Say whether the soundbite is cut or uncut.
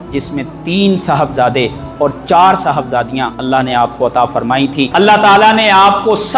cut